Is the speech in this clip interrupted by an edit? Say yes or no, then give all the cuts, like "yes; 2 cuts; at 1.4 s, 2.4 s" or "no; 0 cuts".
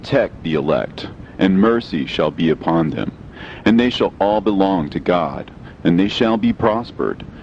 no; 0 cuts